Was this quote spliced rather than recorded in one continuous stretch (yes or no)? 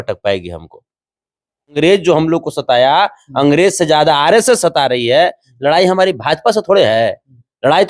yes